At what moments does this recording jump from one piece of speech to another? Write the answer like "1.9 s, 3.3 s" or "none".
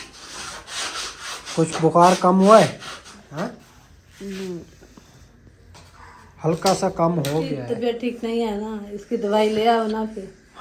3.1 s, 7.6 s